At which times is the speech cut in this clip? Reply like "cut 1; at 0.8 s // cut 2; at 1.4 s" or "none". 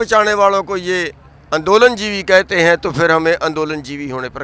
none

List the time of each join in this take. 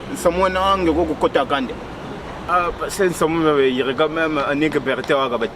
cut 1; at 2.3 s

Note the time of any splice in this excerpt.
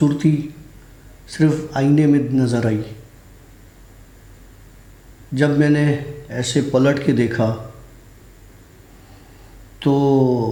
none

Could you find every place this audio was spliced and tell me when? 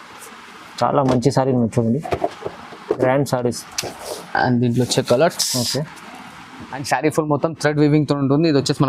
cut 1; at 6.8 s

